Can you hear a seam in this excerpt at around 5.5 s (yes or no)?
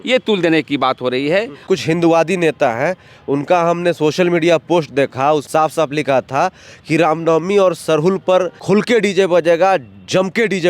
yes